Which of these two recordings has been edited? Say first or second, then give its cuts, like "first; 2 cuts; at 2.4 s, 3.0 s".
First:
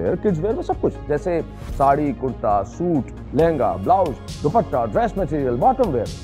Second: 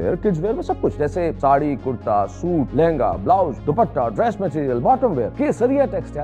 second; 4 cuts; at 1.1 s, 2.7 s, 3.6 s, 5.3 s